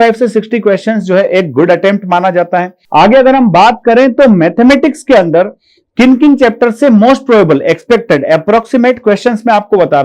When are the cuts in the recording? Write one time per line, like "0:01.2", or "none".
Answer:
0:02.8

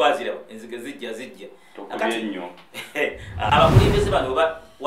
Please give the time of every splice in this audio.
0:03.5

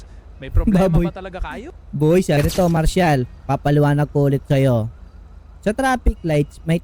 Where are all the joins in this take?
0:02.4

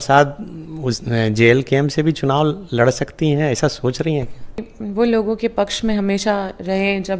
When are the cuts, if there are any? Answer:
0:04.7

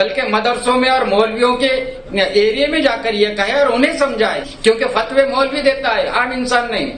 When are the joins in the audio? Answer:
0:04.5

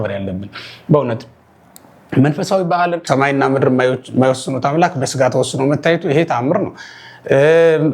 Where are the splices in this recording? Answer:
0:03.0

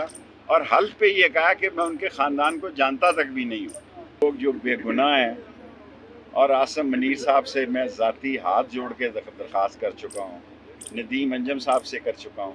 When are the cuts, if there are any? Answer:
0:04.2

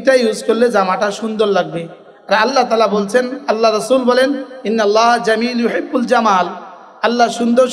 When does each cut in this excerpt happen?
none

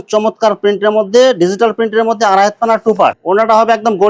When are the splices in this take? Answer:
0:03.2

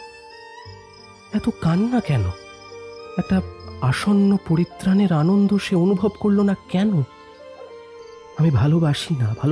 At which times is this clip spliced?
0:03.0

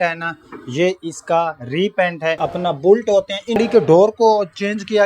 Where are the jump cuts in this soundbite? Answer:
0:02.4
0:03.6

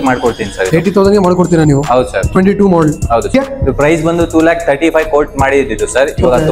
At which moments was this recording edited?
0:03.3

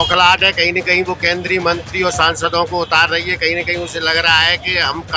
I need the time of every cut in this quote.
none

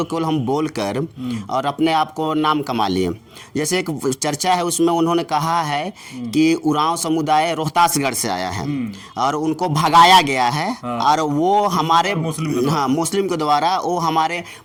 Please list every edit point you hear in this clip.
none

